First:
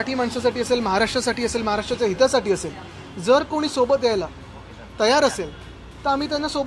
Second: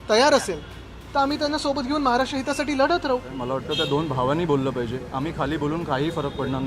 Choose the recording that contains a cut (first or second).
second